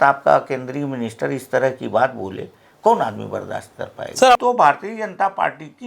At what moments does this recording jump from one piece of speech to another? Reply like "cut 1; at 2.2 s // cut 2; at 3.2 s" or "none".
cut 1; at 4.4 s

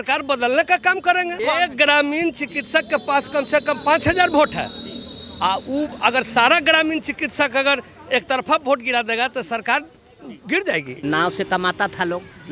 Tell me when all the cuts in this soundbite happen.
cut 1; at 1.4 s // cut 2; at 10.9 s

